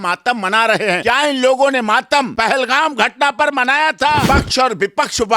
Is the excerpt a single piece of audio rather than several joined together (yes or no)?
no